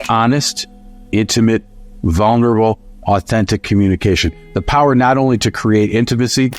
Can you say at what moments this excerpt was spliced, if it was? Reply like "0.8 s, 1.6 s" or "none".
none